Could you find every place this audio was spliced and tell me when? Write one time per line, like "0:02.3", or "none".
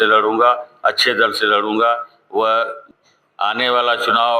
0:02.8